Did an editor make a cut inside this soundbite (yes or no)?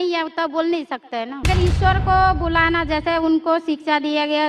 yes